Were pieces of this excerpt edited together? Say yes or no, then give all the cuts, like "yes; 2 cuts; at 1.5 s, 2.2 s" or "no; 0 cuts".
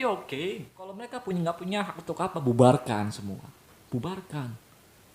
yes; 1 cut; at 1.1 s